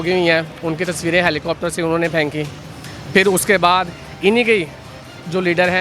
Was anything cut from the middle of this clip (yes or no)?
no